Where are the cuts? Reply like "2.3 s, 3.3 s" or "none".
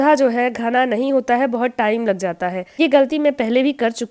2.7 s